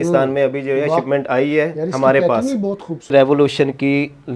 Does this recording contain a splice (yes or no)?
yes